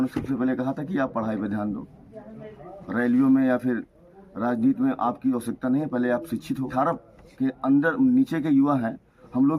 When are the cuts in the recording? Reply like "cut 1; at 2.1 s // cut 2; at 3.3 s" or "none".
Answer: cut 1; at 6.7 s